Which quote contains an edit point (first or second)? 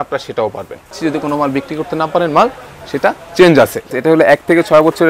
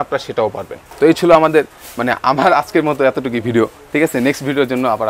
first